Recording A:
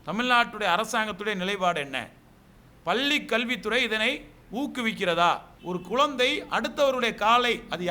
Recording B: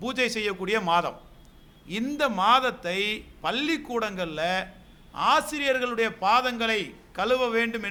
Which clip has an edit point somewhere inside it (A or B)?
A